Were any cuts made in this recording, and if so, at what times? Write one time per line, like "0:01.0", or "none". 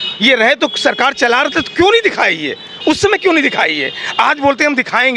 none